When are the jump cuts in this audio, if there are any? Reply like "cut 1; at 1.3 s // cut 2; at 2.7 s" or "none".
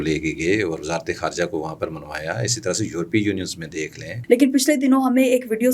cut 1; at 4.1 s